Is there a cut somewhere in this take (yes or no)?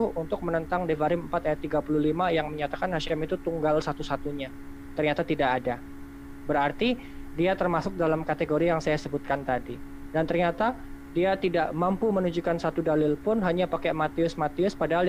no